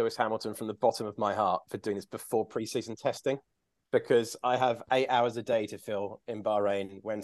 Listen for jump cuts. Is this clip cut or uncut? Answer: uncut